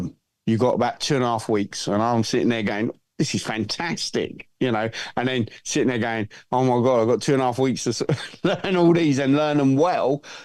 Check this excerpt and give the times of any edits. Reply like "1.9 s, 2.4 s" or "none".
none